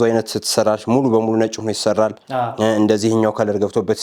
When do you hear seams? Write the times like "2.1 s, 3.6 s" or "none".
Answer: none